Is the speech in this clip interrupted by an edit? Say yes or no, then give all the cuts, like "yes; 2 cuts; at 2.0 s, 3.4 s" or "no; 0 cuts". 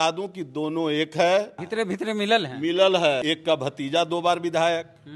yes; 2 cuts; at 1.6 s, 3.2 s